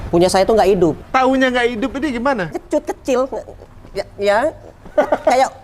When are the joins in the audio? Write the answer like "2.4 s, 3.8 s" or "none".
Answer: 1.0 s, 2.6 s